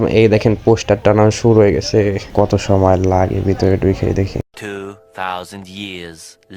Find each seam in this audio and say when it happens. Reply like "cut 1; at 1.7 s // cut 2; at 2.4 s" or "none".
cut 1; at 2.3 s